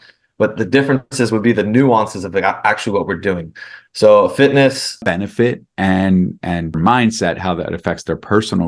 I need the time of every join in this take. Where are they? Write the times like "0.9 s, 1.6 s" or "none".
5.0 s, 6.7 s